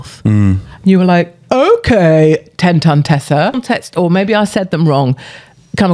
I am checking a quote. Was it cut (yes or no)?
yes